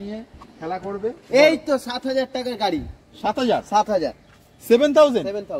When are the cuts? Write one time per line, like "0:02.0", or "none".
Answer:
none